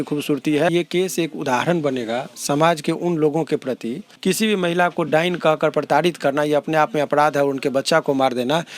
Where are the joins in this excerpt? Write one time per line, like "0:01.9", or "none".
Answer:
0:00.7
0:04.1